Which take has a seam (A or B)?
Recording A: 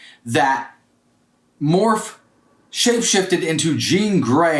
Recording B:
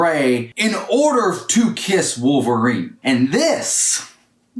B